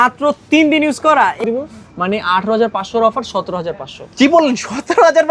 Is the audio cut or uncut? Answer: cut